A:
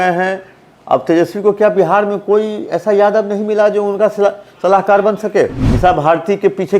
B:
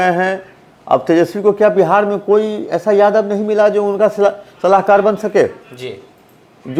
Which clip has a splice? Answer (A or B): A